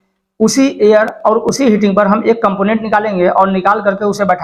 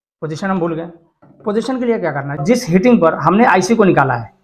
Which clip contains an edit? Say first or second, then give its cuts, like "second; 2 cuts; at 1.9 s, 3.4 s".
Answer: second; 1 cut; at 2.4 s